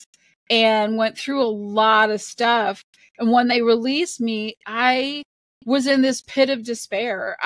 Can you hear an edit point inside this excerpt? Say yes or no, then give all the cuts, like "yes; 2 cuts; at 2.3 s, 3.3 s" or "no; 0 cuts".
no; 0 cuts